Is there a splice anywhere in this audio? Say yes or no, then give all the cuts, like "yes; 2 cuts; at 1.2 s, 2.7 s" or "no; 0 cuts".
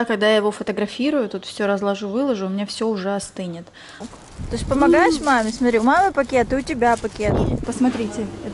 yes; 2 cuts; at 3.9 s, 7.6 s